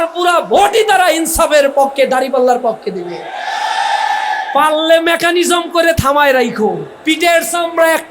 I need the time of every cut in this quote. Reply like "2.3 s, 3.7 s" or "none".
6.9 s